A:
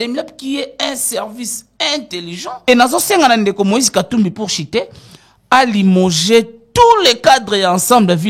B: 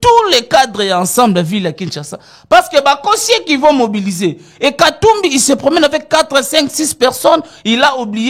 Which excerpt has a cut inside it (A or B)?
A